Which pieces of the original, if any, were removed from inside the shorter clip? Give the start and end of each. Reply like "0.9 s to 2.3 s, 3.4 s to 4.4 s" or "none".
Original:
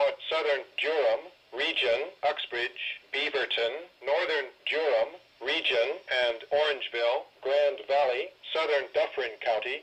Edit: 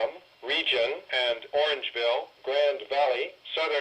2.1 s to 6.0 s